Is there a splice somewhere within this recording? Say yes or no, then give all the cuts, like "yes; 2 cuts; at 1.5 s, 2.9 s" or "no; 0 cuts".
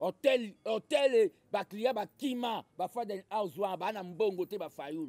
no; 0 cuts